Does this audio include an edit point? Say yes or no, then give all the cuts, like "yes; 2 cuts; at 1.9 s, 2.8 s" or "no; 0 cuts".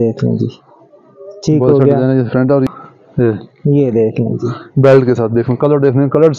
yes; 1 cut; at 2.7 s